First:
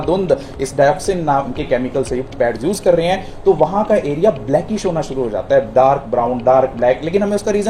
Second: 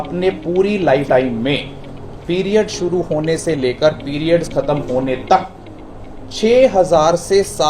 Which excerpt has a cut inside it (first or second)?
second